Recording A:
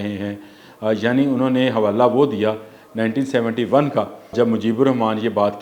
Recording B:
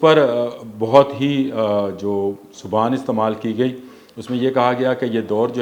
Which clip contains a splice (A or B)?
A